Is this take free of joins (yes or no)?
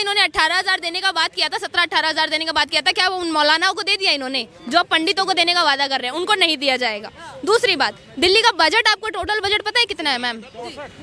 yes